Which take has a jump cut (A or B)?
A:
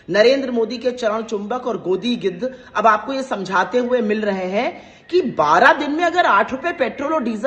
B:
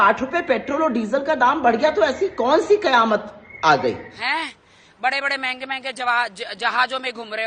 B